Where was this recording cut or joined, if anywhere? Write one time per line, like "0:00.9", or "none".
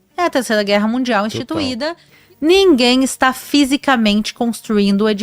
0:02.1